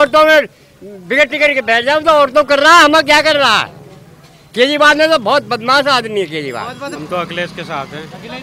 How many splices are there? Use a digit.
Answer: 1